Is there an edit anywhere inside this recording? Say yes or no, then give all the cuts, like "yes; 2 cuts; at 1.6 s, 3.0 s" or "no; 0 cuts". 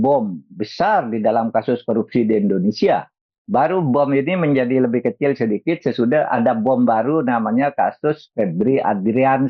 no; 0 cuts